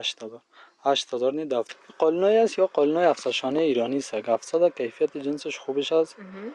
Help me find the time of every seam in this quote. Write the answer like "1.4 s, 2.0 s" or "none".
1.8 s